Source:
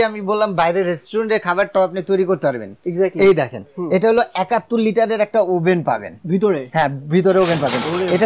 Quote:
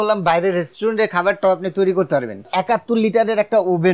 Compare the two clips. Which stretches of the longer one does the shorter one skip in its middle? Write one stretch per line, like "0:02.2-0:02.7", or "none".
0:02.8-0:04.3